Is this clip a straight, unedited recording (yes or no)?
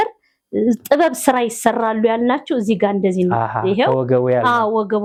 yes